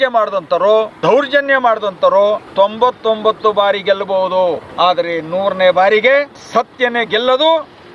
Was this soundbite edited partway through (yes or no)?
yes